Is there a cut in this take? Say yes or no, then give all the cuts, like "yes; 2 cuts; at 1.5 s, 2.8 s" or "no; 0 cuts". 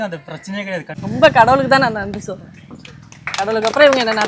yes; 1 cut; at 0.9 s